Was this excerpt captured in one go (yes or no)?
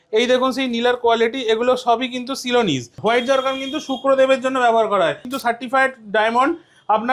no